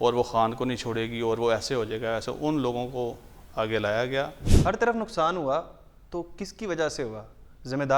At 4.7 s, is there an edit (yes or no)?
yes